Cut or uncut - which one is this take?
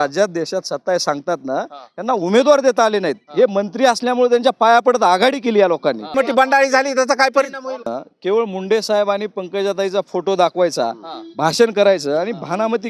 cut